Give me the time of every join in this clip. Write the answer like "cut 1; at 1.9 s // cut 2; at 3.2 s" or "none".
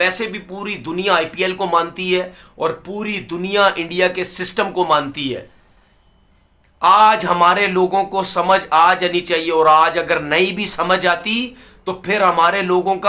none